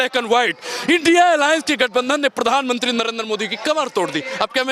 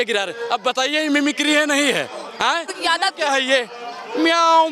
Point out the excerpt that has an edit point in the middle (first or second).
second